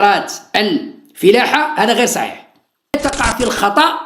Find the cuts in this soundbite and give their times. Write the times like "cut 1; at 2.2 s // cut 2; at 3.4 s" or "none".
cut 1; at 2.9 s